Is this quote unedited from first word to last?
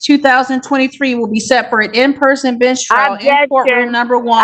yes; 0 cuts

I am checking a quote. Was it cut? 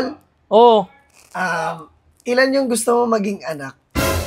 no; 0 cuts

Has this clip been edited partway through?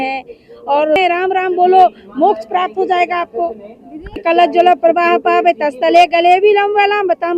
yes; 2 cuts; at 1.0 s, 4.2 s

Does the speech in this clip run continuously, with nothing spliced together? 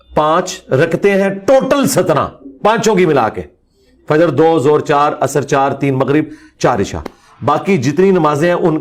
yes; 0 cuts

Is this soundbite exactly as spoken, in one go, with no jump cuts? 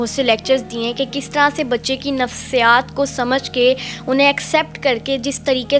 yes; 0 cuts

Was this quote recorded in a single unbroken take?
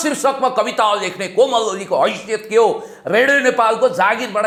yes; 0 cuts

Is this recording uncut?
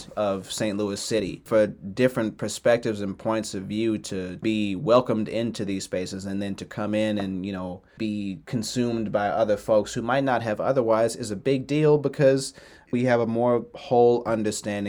no; 4 cuts; at 1.4 s, 4.4 s, 8.0 s, 12.9 s

